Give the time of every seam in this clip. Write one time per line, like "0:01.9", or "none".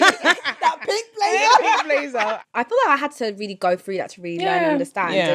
0:02.4